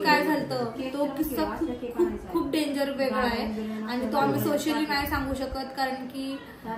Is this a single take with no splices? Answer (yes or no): yes